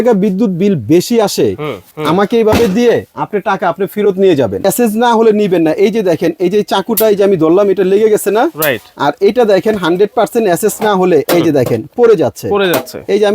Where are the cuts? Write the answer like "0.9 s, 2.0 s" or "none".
1.9 s, 4.6 s